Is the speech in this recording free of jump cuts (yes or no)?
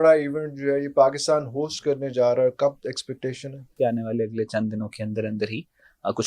no